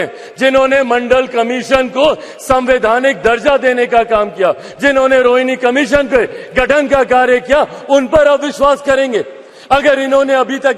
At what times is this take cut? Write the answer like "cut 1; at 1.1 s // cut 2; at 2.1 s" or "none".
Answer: none